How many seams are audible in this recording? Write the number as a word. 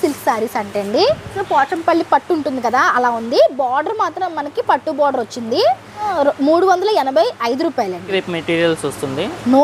three